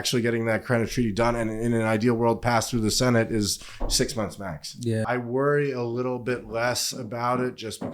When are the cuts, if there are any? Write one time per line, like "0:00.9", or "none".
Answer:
0:05.1